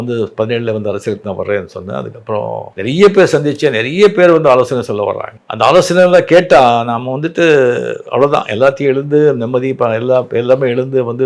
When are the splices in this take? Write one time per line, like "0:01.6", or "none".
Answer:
none